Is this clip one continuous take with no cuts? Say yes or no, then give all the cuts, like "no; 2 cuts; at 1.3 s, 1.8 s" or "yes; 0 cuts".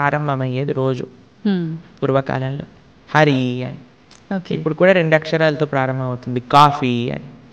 yes; 0 cuts